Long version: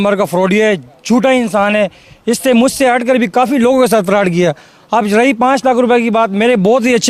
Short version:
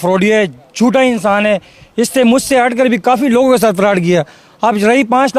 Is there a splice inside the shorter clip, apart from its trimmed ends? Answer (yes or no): no